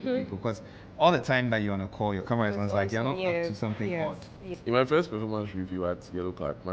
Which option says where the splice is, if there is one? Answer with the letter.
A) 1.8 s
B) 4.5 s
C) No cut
B